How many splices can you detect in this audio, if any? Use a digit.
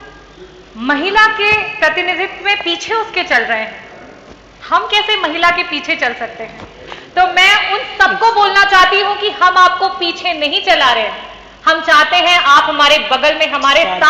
0